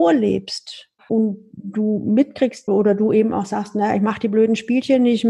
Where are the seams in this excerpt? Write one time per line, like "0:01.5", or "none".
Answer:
0:02.6

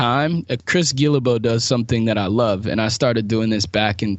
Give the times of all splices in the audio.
none

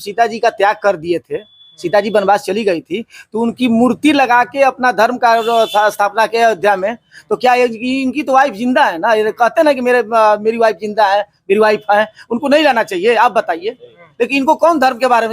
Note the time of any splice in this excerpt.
none

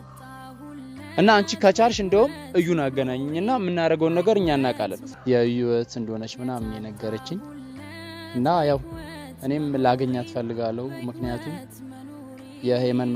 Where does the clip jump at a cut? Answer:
0:05.1

